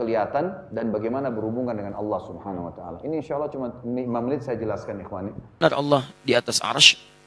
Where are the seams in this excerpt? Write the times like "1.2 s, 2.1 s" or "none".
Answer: 5.4 s